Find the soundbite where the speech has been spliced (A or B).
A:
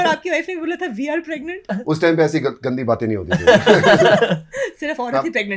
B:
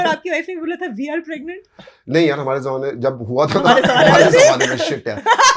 A